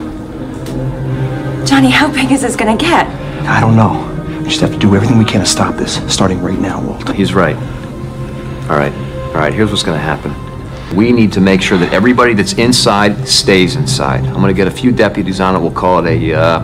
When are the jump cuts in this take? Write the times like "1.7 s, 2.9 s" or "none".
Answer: none